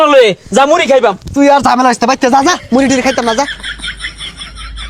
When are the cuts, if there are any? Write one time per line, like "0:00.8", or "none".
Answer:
0:03.5